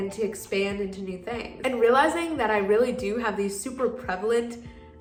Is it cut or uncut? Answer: uncut